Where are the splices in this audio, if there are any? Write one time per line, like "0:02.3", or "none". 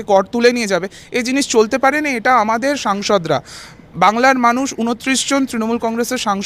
none